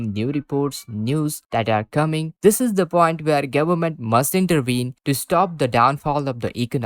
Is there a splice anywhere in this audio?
yes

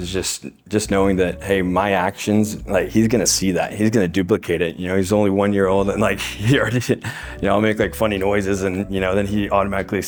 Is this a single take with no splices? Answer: yes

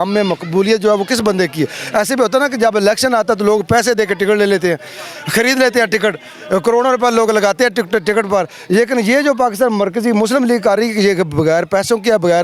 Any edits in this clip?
no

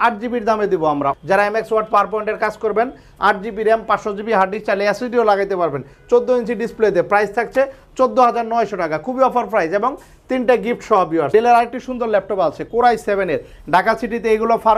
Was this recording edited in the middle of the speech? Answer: yes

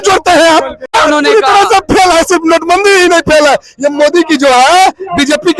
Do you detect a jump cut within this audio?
yes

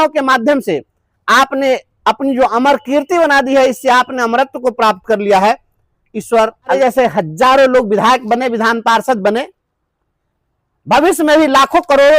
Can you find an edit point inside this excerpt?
yes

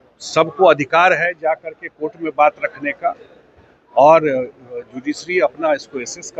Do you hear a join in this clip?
no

